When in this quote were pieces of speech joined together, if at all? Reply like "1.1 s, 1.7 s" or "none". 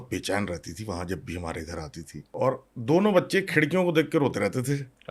2.3 s